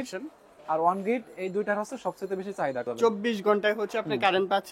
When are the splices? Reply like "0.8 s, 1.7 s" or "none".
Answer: 2.9 s